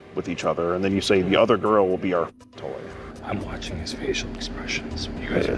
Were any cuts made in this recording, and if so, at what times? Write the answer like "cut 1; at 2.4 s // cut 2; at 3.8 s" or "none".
cut 1; at 3.1 s